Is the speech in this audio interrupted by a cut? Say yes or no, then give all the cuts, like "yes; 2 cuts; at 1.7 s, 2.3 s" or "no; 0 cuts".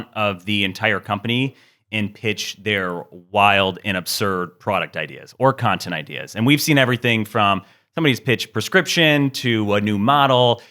no; 0 cuts